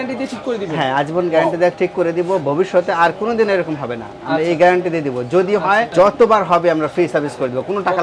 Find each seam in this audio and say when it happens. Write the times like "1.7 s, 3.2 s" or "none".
5.9 s